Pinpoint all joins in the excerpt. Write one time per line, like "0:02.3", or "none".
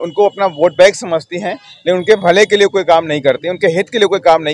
none